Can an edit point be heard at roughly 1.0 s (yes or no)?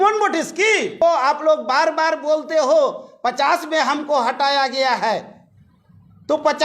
yes